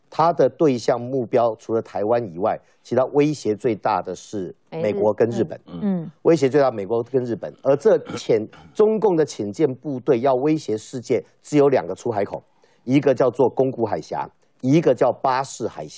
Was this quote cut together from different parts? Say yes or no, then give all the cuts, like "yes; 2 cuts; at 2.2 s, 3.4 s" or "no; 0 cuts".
no; 0 cuts